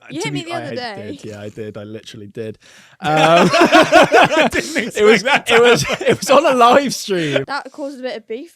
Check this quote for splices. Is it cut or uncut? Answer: cut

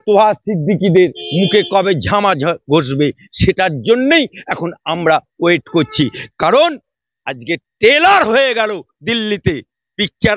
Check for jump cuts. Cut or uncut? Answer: uncut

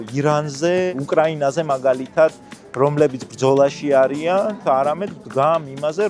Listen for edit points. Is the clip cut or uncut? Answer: cut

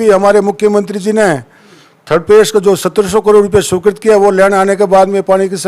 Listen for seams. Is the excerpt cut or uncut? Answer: uncut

